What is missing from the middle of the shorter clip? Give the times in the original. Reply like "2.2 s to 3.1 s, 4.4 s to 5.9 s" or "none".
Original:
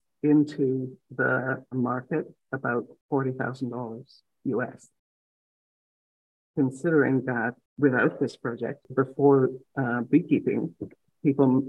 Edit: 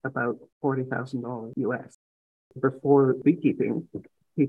4.0 s to 4.4 s, 5.4 s to 8.8 s, 9.5 s to 10.1 s